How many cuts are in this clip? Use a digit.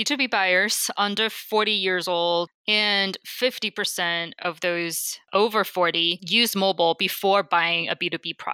3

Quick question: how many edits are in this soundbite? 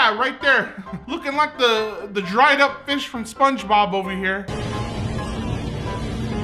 2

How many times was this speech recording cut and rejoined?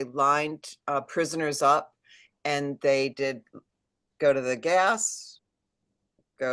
0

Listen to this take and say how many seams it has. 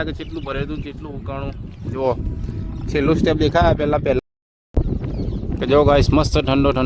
1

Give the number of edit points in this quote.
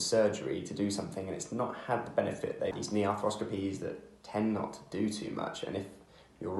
1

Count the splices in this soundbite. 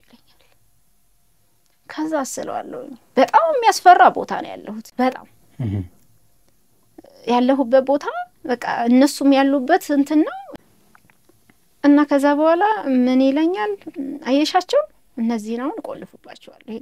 0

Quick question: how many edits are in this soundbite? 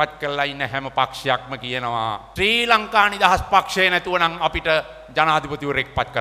1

